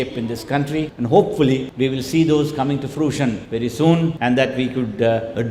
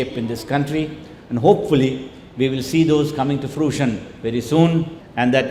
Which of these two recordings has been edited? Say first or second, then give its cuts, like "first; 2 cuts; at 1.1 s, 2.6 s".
first; 4 cuts; at 0.9 s, 1.7 s, 3.4 s, 4.2 s